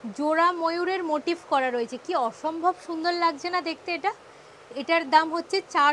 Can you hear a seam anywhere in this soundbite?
no; 0 cuts

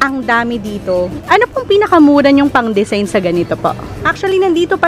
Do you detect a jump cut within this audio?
yes; 2 cuts; at 1.2 s, 4.1 s

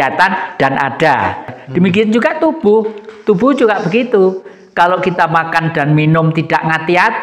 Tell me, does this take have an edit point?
yes; 1 cut; at 1.6 s

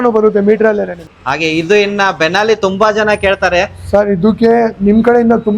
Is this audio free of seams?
no; 1 cut; at 1.0 s

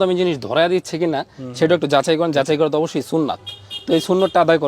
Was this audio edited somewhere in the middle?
no; 0 cuts

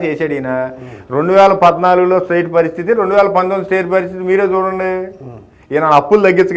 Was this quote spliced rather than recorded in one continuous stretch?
no; 0 cuts

